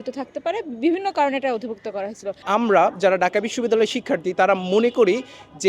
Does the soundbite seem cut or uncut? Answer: cut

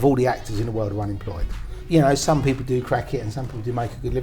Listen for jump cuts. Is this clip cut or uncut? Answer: cut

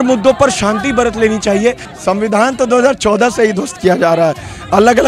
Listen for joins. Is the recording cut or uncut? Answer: cut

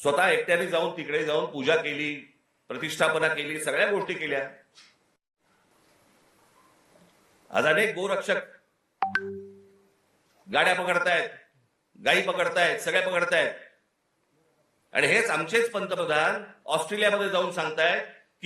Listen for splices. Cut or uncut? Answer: cut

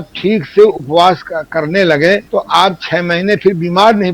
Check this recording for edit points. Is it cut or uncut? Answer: cut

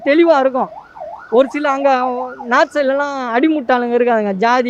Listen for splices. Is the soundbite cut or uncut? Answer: uncut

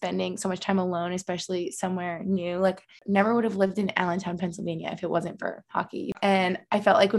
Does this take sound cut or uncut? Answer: cut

